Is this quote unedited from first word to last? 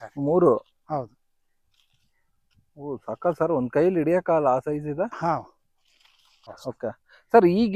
no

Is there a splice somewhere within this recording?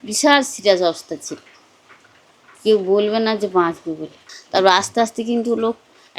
yes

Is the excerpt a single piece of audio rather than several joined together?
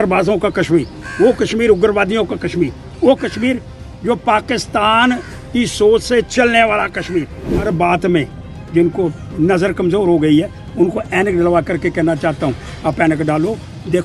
no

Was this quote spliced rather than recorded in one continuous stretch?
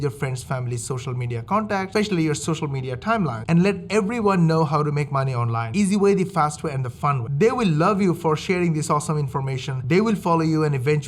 no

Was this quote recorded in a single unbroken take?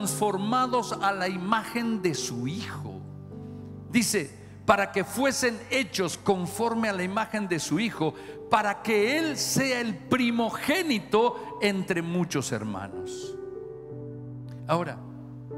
yes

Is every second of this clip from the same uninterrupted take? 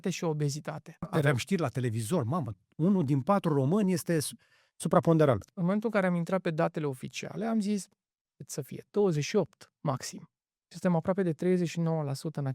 no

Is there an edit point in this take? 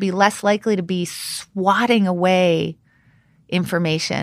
no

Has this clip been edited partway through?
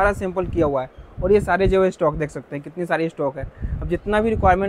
no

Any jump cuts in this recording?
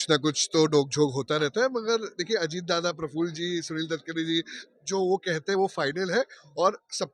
no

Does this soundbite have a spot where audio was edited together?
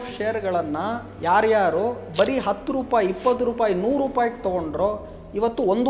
no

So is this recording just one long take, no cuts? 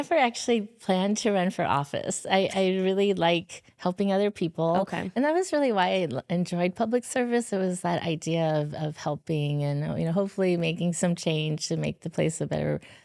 yes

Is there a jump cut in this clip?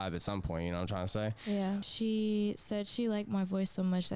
yes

